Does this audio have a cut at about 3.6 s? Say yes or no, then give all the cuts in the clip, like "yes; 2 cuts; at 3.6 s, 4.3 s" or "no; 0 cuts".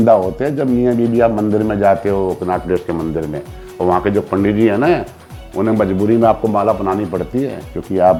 no; 0 cuts